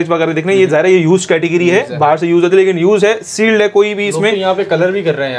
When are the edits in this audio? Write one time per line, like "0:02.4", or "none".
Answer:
none